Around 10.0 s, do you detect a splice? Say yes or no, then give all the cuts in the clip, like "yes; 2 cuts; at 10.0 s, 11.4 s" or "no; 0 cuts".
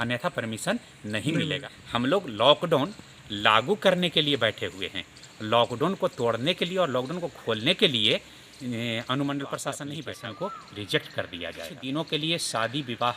yes; 3 cuts; at 1.6 s, 10.0 s, 11.7 s